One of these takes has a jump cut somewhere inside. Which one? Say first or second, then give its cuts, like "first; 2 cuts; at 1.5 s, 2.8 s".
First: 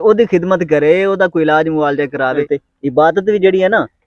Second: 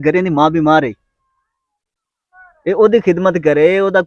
first; 1 cut; at 2.4 s